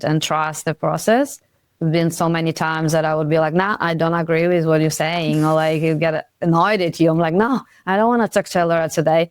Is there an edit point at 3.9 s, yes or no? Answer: no